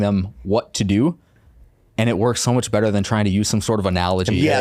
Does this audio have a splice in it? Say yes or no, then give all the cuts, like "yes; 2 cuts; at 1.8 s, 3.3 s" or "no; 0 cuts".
no; 0 cuts